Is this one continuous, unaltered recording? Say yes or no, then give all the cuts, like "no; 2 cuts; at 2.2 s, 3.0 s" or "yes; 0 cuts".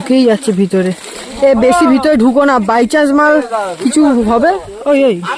yes; 0 cuts